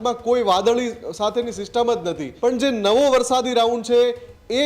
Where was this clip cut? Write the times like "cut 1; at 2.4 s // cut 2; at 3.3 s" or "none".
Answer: cut 1; at 2.2 s